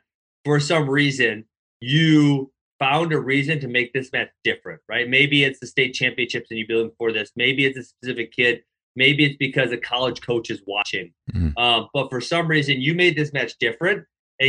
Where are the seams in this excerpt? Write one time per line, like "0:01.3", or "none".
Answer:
0:02.6